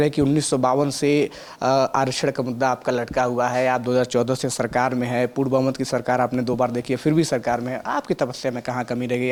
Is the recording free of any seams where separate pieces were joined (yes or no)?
yes